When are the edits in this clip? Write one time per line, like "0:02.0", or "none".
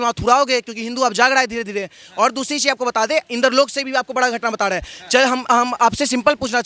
none